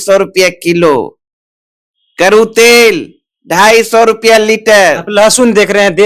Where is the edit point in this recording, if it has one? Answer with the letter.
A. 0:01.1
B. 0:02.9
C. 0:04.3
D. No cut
D